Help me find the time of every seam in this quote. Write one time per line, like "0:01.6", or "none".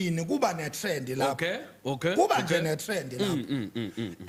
none